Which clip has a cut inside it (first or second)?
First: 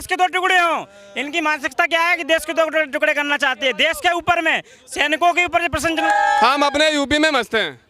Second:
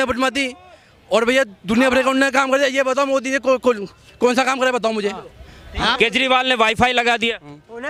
first